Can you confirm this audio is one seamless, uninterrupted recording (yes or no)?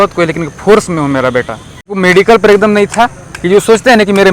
no